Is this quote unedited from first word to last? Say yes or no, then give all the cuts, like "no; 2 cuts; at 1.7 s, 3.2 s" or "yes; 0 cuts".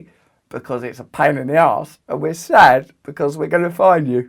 yes; 0 cuts